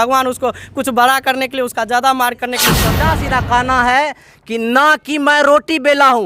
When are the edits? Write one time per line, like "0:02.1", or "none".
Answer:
0:02.9